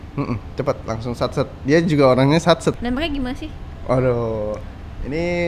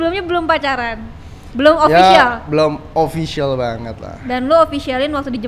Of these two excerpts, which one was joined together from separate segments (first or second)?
first